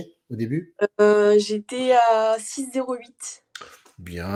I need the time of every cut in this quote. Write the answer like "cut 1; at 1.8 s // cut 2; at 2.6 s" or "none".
none